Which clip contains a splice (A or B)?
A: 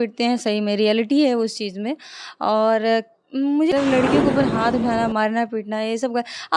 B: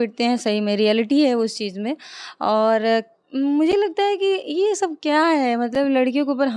A